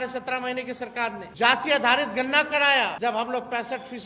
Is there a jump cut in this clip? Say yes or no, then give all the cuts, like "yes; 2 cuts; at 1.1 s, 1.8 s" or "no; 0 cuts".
yes; 2 cuts; at 1.2 s, 3.0 s